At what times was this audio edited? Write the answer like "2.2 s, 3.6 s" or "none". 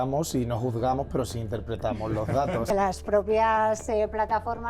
2.7 s